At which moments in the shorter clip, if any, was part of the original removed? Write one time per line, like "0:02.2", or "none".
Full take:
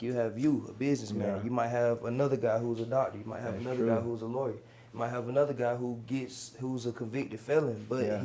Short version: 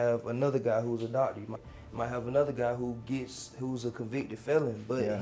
0:01.6